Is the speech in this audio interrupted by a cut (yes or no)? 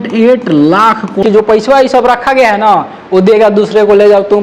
yes